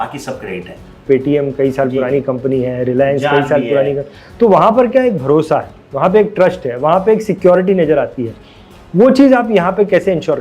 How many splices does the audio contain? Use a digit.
1